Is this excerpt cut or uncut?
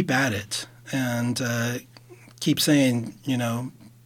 uncut